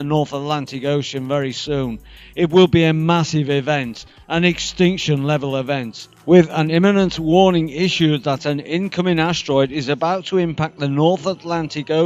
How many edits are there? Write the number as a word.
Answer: one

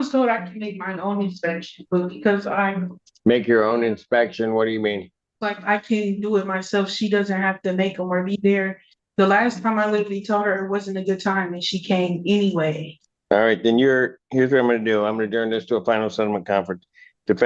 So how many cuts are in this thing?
zero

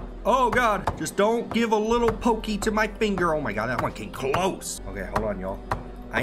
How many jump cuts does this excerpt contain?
two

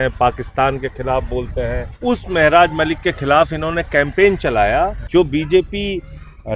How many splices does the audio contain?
two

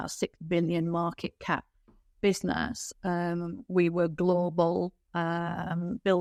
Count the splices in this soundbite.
zero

